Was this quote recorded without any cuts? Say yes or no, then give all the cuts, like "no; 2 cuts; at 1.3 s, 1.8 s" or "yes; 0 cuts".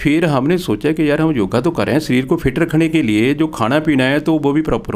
yes; 0 cuts